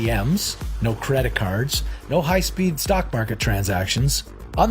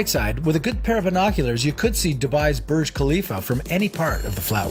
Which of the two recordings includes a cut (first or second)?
first